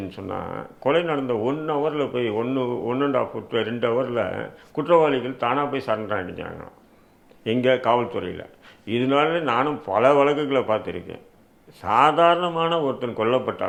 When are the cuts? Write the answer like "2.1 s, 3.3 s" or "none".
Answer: none